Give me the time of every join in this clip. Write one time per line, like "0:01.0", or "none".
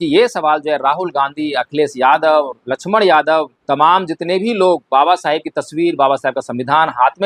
0:03.6